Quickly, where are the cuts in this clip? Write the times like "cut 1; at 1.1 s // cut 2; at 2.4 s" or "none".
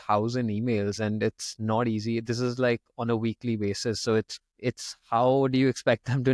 cut 1; at 4.4 s

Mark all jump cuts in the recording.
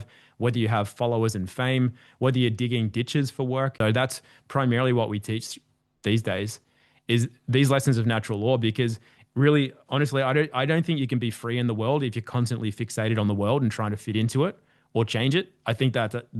cut 1; at 3.7 s

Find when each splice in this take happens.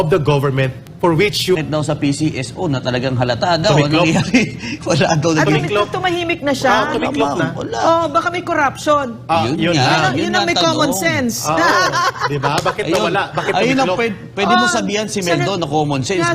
cut 1; at 1.6 s

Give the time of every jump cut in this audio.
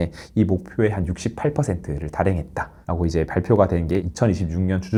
none

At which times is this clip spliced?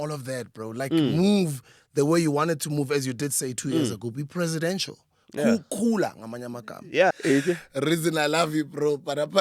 cut 1; at 7.1 s

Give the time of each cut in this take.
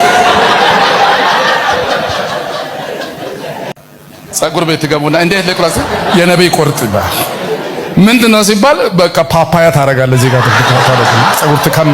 cut 1; at 3.8 s

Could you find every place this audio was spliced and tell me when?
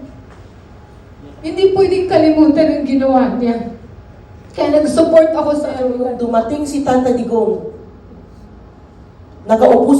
cut 1; at 6.1 s

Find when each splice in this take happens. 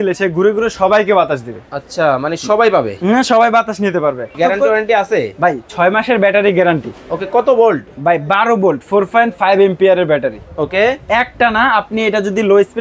cut 1; at 4.4 s

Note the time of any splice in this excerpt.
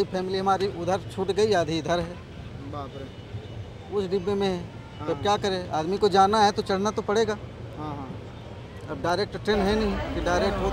none

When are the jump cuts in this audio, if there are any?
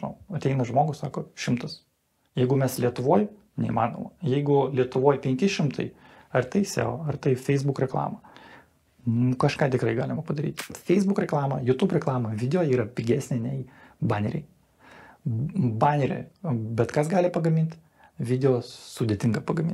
cut 1; at 10.7 s

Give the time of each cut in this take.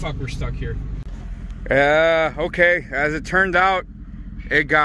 cut 1; at 1.0 s

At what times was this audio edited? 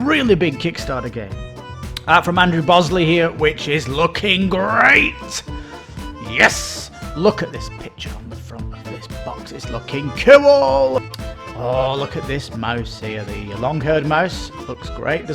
cut 1; at 1.6 s // cut 2; at 11.0 s

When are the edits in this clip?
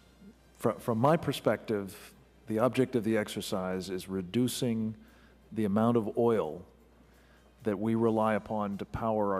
none

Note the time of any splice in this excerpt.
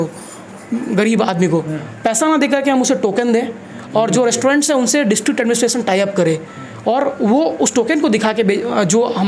none

